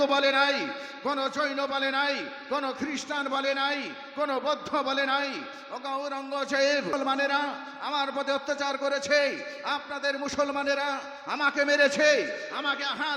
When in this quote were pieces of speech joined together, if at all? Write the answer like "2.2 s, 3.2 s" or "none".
6.9 s